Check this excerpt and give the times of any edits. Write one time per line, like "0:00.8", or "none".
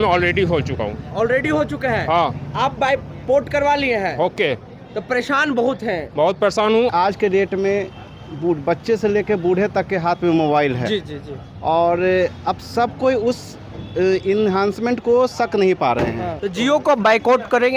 0:06.9
0:16.4